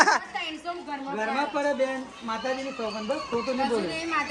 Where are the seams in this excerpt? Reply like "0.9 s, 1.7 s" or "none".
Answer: none